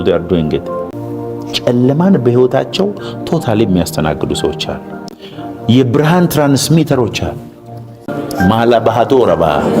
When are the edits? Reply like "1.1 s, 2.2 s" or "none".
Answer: 1.0 s, 8.1 s